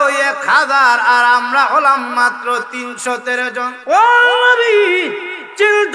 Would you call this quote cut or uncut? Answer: cut